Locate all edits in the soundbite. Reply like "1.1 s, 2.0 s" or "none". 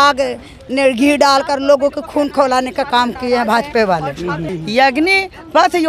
4.5 s